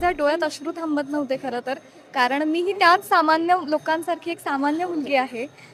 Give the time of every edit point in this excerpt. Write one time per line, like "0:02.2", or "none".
none